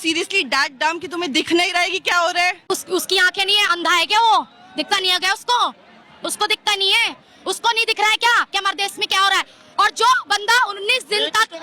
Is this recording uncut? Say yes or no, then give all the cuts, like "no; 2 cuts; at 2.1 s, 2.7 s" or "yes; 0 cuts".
no; 1 cut; at 2.6 s